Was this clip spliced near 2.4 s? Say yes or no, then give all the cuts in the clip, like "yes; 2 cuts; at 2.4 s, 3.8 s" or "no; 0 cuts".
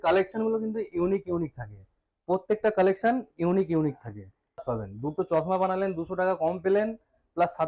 no; 1 cut; at 4.6 s